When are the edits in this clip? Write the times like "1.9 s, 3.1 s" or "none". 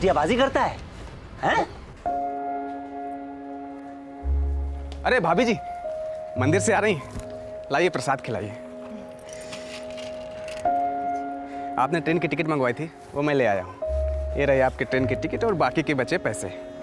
1.9 s

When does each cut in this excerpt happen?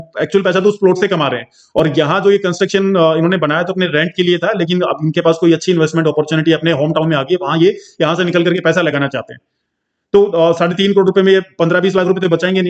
none

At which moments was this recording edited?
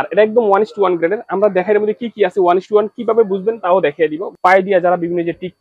4.3 s

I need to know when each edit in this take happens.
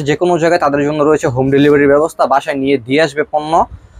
none

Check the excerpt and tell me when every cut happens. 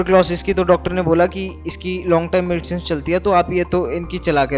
none

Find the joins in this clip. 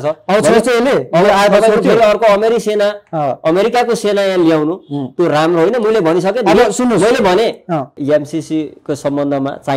8.0 s

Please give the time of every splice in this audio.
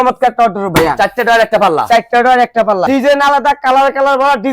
2.9 s

